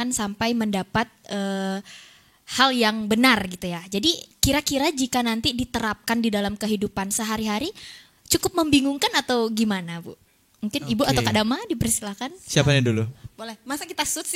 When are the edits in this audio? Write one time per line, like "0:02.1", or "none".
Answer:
none